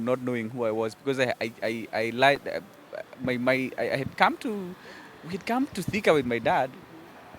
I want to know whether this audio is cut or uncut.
uncut